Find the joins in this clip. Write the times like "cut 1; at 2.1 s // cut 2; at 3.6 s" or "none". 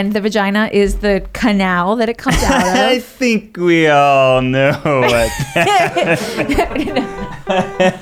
none